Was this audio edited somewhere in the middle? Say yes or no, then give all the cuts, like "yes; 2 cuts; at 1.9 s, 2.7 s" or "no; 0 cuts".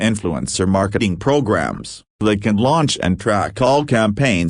yes; 1 cut; at 0.9 s